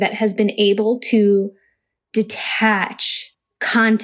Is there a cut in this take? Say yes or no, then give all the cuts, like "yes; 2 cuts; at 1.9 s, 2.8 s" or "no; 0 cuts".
no; 0 cuts